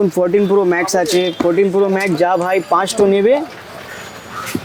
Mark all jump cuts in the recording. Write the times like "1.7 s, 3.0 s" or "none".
none